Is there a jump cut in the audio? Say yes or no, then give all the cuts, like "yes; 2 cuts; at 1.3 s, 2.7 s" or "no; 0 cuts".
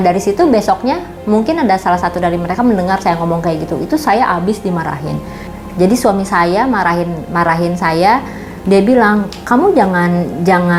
no; 0 cuts